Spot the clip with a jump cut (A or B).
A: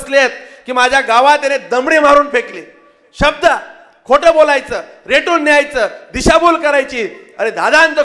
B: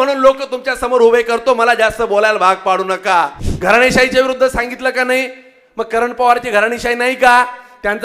B